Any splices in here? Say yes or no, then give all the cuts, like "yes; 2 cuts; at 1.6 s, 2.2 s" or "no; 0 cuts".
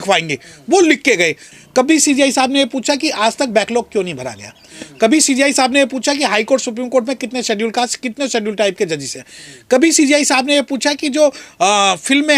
yes; 1 cut; at 1.4 s